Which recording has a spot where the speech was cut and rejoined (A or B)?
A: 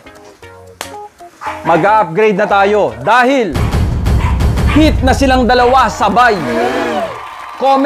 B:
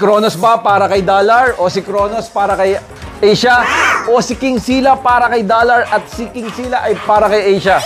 A